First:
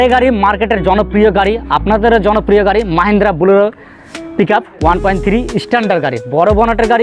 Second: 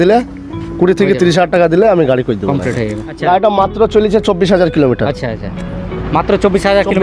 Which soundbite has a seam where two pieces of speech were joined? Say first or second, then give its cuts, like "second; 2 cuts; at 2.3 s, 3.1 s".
second; 1 cut; at 3.1 s